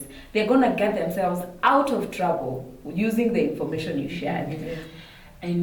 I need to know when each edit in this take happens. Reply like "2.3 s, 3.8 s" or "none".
4.6 s